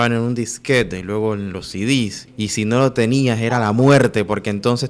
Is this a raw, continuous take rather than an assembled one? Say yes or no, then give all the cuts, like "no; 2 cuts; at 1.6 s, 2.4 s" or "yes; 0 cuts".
no; 1 cut; at 2.2 s